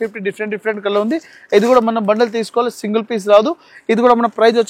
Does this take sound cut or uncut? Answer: uncut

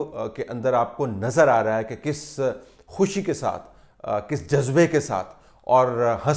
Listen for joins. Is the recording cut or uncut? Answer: uncut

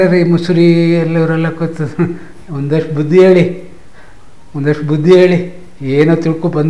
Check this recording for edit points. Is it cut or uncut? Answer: uncut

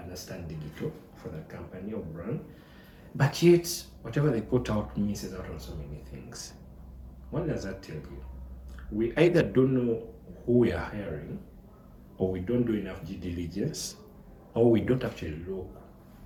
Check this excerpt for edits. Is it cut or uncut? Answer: uncut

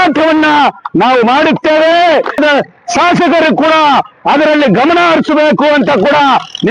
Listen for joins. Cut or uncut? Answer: cut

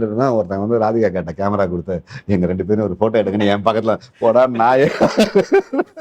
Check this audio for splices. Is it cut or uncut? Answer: uncut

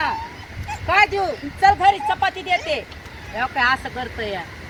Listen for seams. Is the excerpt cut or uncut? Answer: uncut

